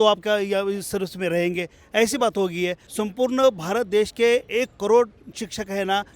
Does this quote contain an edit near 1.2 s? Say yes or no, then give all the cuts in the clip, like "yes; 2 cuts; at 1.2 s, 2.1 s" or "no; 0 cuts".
no; 1 cut; at 2.8 s